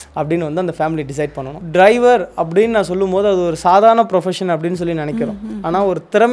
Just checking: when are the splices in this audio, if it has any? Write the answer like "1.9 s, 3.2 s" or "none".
1.5 s